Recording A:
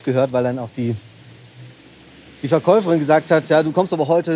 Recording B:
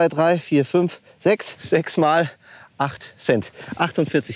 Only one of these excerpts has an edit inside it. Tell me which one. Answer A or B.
B